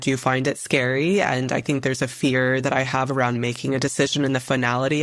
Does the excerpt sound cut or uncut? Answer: cut